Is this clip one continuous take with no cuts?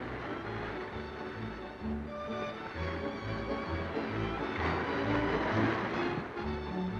no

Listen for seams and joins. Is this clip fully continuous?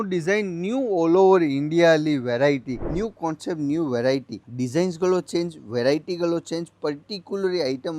no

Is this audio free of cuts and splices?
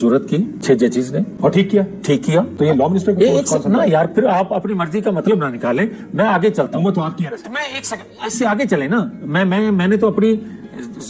yes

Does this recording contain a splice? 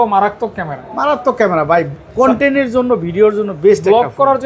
no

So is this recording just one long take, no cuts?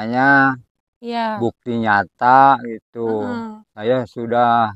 yes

